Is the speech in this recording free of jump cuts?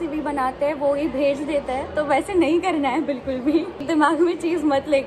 no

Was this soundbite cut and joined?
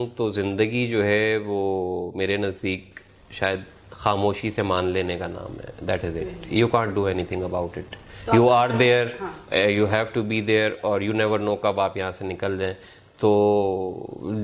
no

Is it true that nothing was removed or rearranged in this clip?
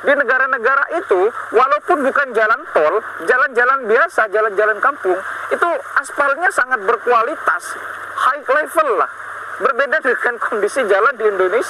yes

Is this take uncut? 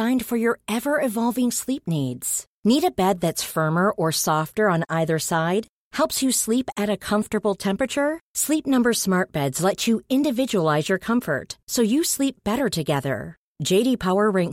yes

